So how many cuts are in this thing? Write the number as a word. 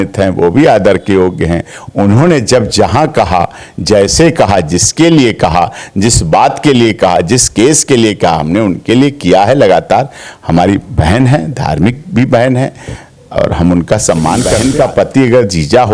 one